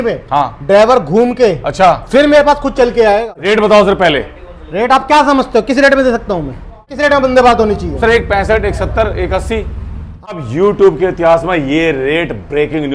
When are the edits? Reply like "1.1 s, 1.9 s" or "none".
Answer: 3.4 s, 6.9 s, 10.3 s